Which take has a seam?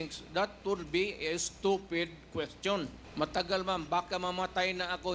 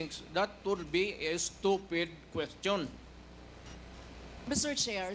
first; 1 cut; at 3.0 s

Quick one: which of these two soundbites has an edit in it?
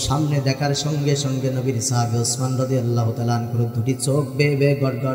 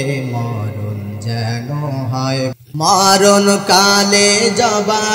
second; 1 cut; at 2.5 s

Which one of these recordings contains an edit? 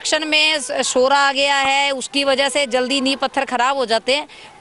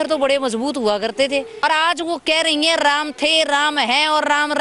second; 1 cut; at 1.6 s

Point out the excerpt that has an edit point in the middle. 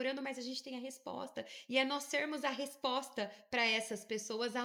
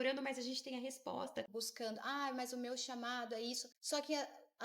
second; 2 cuts; at 1.5 s, 3.7 s

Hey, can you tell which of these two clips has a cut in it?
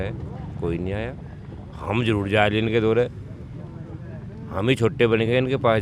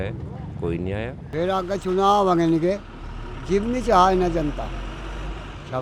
second; 1 cut; at 1.3 s

